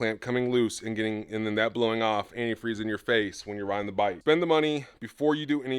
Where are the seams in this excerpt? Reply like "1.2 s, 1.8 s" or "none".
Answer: 4.2 s